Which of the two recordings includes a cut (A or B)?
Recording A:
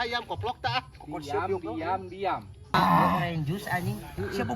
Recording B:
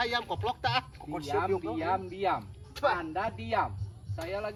A